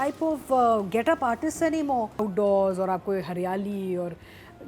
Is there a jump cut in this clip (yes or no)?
yes